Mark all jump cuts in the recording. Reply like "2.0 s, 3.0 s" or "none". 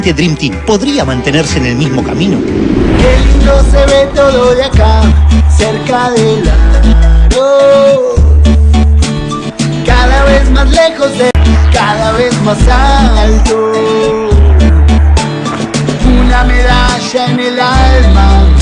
17.7 s